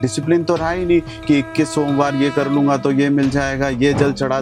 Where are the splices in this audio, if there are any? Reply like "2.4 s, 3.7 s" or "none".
none